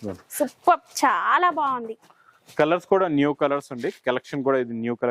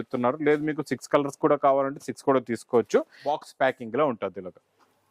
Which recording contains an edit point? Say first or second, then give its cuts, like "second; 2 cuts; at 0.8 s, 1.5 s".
second; 1 cut; at 3.2 s